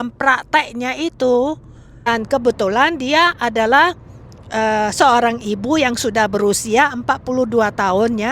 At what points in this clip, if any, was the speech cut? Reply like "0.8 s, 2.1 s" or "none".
2.1 s